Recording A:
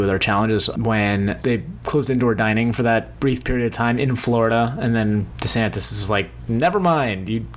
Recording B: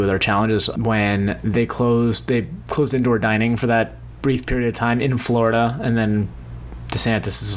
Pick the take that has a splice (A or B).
A